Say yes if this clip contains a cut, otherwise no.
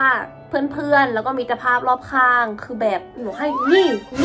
yes